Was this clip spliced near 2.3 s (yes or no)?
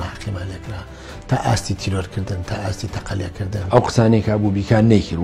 no